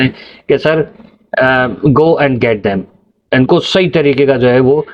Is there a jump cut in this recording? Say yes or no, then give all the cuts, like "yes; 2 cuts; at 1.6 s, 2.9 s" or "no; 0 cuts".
no; 0 cuts